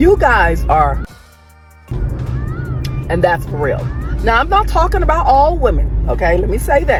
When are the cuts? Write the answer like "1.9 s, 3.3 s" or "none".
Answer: none

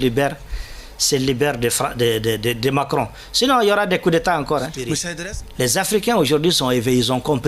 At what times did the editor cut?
5.0 s

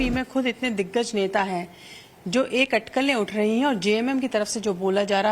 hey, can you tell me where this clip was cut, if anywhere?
4.1 s

